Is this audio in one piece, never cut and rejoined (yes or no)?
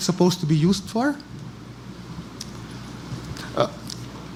yes